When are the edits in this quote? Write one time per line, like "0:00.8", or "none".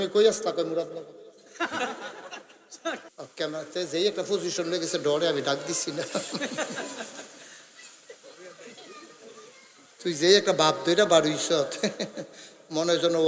0:03.1